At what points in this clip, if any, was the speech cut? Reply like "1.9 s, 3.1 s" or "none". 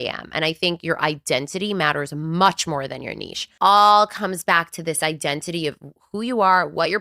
3.5 s